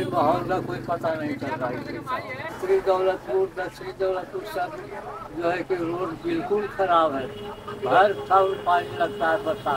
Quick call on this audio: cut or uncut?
cut